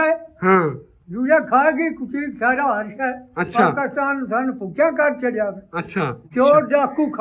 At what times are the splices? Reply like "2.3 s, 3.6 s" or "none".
none